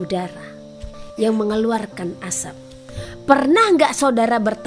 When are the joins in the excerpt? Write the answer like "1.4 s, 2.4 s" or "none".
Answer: 1.0 s, 3.0 s

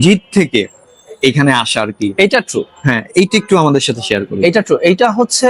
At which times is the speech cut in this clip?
none

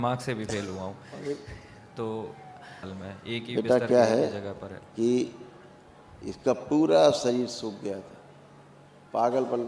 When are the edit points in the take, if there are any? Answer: 2.9 s

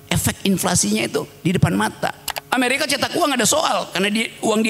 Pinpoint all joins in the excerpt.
2.3 s

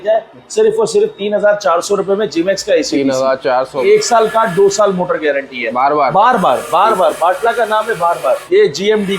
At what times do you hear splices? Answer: 3.8 s, 5.6 s, 8.4 s

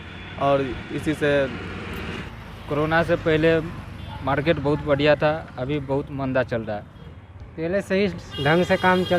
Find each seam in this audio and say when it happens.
2.2 s, 7.0 s

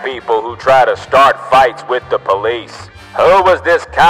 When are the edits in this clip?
3.1 s

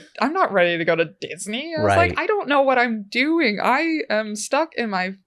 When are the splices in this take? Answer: none

